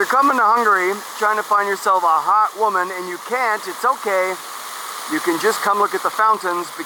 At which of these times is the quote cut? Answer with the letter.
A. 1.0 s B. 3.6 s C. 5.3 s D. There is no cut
D